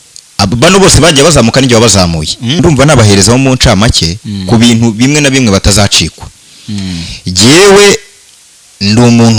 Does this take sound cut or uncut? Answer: cut